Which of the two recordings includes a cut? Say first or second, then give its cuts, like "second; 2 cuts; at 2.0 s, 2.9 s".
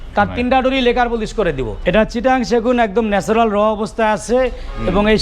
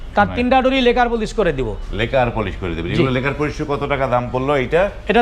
first; 1 cut; at 1.7 s